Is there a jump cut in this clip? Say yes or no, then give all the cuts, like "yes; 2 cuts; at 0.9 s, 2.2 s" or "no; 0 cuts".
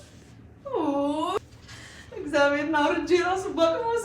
yes; 1 cut; at 1.4 s